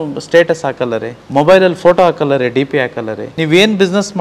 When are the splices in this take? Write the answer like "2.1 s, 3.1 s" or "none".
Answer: 1.2 s, 3.2 s